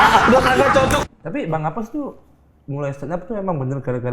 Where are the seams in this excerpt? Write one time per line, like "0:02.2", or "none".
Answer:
0:01.0

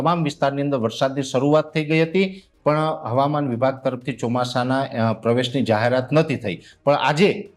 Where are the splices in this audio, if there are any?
none

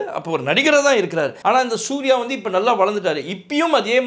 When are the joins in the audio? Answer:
0:01.4

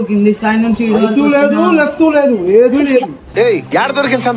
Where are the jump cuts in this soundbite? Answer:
none

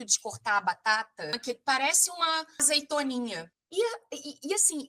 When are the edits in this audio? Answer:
0:01.4
0:02.6

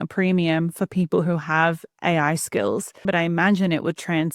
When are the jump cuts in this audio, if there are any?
0:03.1

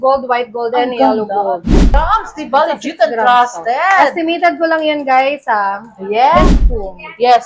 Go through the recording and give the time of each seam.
0:02.0
0:06.4

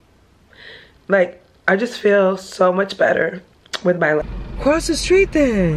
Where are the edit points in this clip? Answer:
0:04.2

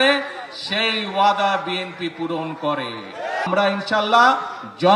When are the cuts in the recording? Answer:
0:03.5

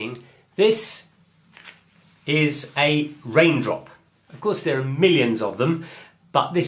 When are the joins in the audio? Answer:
0:01.2

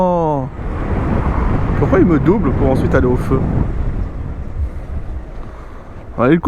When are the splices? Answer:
0:00.8
0:05.2

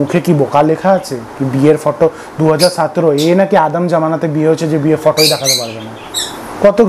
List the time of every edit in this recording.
none

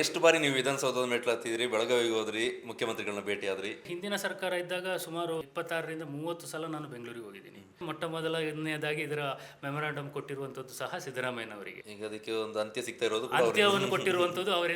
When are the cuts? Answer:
0:03.9
0:05.4
0:07.8
0:11.8

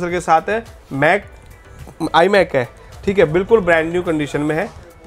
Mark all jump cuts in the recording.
none

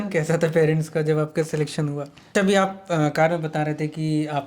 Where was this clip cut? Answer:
0:02.3

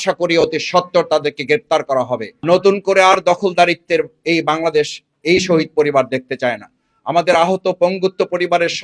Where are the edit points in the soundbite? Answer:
0:02.3

